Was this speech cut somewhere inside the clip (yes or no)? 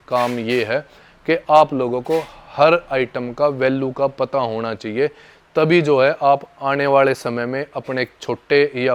no